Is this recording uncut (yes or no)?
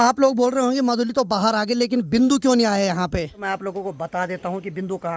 no